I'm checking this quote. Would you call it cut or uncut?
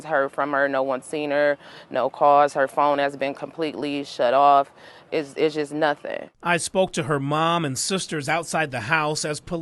uncut